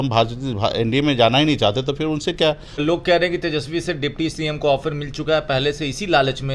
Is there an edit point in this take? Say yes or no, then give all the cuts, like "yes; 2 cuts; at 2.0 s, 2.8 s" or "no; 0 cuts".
yes; 1 cut; at 2.8 s